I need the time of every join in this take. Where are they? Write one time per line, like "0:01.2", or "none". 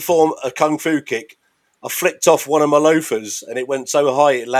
none